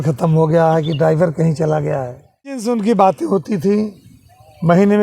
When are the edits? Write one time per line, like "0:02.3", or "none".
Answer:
0:02.7